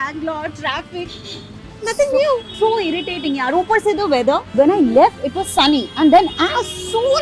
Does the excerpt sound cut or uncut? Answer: uncut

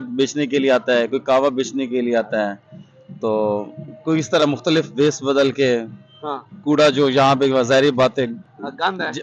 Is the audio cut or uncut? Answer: uncut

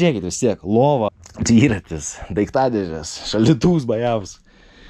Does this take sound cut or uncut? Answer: cut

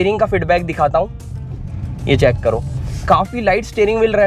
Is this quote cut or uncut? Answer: uncut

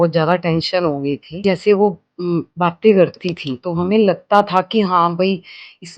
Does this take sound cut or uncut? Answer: cut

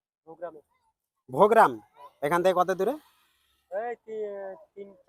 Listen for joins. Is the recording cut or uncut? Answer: uncut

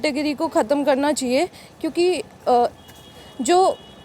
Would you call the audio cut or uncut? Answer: uncut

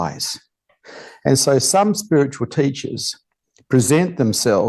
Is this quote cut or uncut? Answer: uncut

